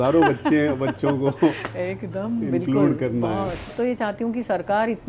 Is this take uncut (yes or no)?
no